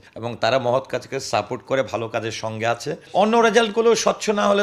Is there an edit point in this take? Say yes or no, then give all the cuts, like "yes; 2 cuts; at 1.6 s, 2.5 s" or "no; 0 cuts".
yes; 1 cut; at 2.9 s